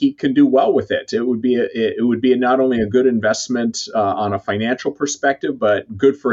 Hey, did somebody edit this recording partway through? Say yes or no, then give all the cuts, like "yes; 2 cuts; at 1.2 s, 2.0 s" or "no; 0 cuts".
no; 0 cuts